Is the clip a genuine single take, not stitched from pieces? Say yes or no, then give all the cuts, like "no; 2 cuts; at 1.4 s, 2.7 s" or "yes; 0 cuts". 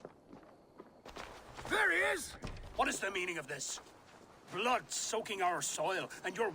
yes; 0 cuts